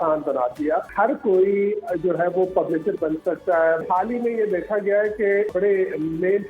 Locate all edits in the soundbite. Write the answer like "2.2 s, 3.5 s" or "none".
0.9 s, 3.8 s, 5.5 s